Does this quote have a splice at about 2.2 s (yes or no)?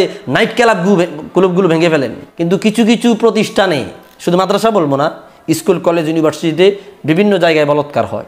yes